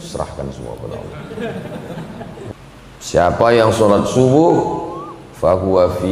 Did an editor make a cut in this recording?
yes; 1 cut; at 2.5 s

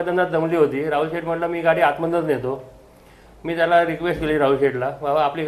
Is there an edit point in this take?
no; 0 cuts

